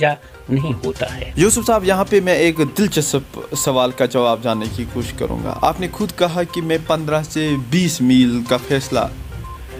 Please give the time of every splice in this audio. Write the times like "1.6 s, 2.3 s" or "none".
none